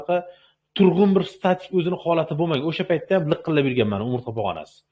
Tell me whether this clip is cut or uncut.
uncut